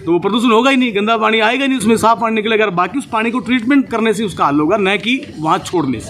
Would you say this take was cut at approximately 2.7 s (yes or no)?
no